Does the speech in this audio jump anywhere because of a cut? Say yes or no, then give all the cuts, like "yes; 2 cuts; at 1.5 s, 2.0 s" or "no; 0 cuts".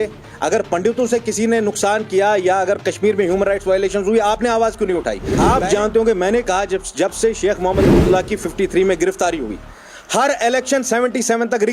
yes; 1 cut; at 5.3 s